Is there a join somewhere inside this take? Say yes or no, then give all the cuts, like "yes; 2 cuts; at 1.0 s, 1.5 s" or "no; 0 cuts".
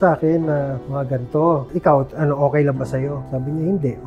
yes; 2 cuts; at 1.7 s, 3.2 s